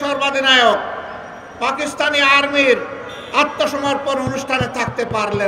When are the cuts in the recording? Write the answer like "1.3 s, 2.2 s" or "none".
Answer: none